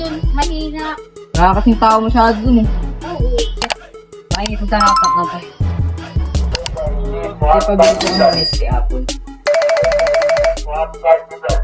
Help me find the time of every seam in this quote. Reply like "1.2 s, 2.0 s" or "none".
6.5 s